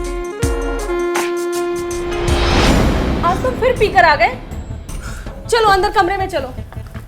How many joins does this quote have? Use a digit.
1